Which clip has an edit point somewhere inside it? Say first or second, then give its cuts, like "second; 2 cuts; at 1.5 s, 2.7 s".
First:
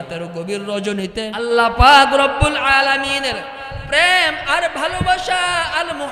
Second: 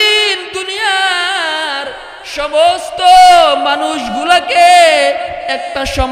first; 1 cut; at 1.1 s